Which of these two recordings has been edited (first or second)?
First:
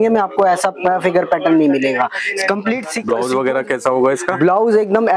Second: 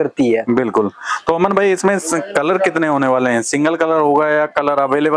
first